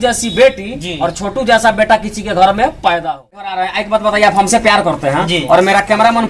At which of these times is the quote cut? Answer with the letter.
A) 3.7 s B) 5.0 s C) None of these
A